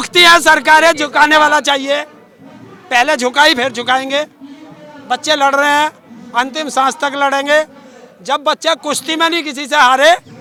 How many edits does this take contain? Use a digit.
0